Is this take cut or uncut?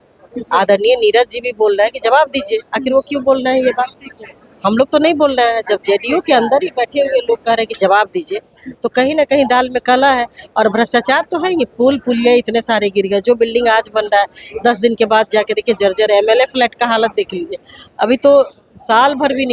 uncut